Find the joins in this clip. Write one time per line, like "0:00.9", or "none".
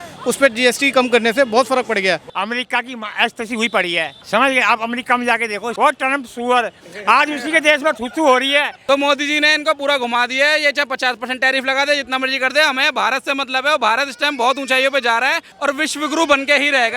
0:02.3
0:04.2
0:05.7
0:08.7
0:15.5